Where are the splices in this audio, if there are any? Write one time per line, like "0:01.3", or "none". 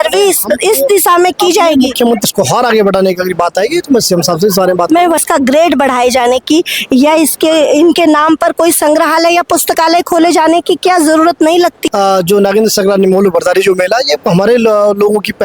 0:02.2
0:05.2
0:11.8